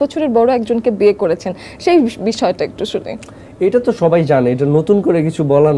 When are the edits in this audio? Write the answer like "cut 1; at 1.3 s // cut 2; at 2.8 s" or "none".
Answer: none